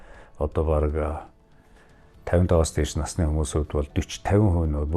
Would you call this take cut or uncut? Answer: uncut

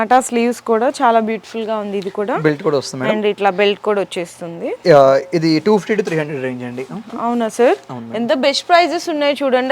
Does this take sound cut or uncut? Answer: uncut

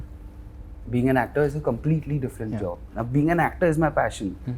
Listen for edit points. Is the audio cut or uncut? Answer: uncut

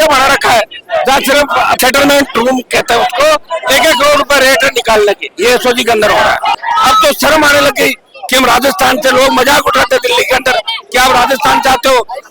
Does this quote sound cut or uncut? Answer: cut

